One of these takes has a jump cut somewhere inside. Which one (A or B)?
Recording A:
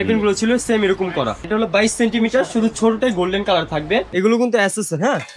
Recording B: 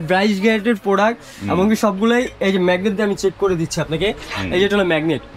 A